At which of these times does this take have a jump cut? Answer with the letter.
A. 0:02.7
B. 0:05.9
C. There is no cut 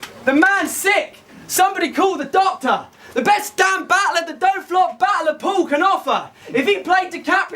B